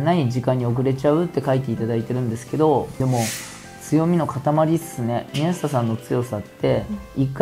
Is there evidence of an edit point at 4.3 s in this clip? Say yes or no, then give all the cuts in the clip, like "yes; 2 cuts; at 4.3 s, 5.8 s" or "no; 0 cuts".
no; 1 cut; at 2.9 s